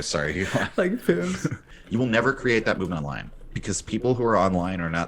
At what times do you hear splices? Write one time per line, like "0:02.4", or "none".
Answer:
0:01.7